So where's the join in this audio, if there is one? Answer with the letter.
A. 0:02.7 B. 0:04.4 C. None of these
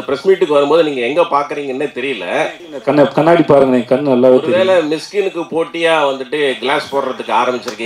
A